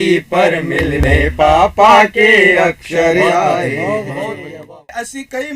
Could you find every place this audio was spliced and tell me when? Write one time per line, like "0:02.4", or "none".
0:04.5